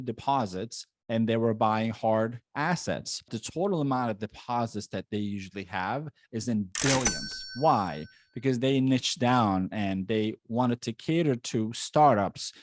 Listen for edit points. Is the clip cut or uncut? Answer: cut